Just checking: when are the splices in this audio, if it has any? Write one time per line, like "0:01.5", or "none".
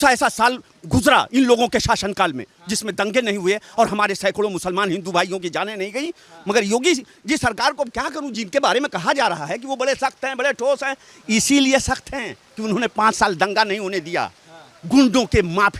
none